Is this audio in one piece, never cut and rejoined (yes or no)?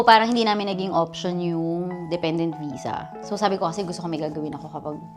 yes